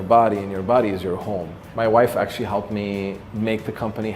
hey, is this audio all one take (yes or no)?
no